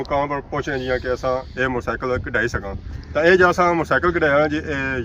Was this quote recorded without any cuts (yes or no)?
no